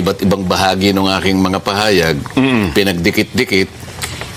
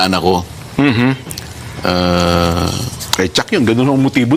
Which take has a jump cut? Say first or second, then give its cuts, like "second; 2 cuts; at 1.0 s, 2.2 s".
second; 1 cut; at 2.5 s